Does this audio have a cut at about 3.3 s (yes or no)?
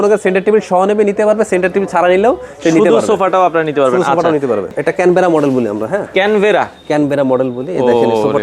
no